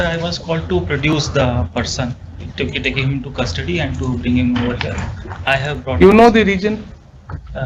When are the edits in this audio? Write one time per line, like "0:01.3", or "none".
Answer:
none